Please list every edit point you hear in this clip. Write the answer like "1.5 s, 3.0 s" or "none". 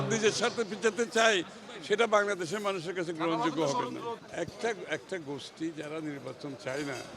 4.2 s